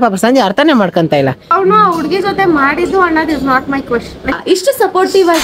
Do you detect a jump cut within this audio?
yes; 2 cuts; at 1.5 s, 4.4 s

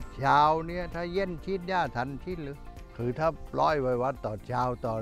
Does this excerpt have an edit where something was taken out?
no; 0 cuts

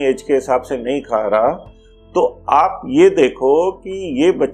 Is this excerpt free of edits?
yes; 0 cuts

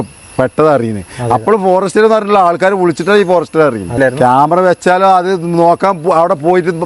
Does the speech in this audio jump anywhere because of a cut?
yes; 1 cut; at 3.9 s

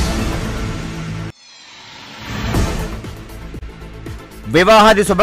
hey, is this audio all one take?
no; 2 cuts; at 1.1 s, 3.7 s

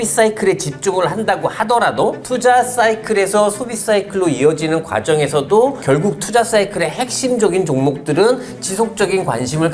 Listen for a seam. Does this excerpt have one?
no; 0 cuts

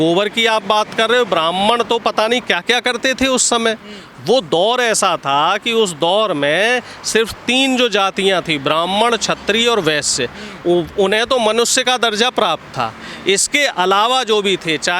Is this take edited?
no; 0 cuts

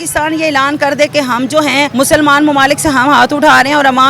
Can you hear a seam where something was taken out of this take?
yes; 1 cut; at 1.9 s

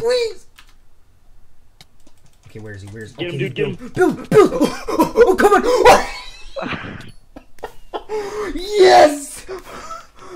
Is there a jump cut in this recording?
yes; 1 cut; at 5.6 s

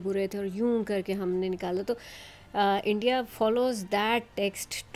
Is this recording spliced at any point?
no; 0 cuts

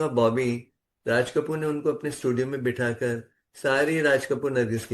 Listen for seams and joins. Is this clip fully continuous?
yes; 0 cuts

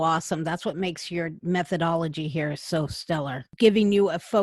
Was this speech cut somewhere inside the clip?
yes; 2 cuts; at 1.4 s, 3.5 s

